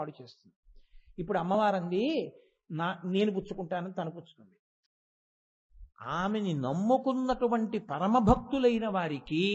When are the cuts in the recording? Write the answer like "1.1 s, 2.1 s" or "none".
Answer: 5.0 s